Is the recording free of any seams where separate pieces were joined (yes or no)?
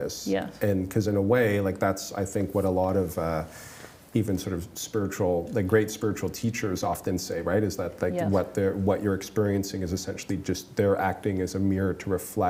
yes